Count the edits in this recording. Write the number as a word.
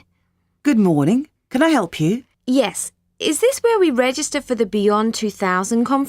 one